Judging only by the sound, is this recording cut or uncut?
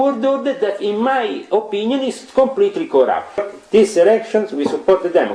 cut